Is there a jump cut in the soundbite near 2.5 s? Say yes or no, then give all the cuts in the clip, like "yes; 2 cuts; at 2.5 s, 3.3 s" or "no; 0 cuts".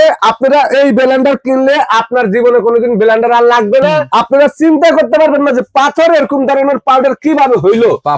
no; 1 cut; at 4.1 s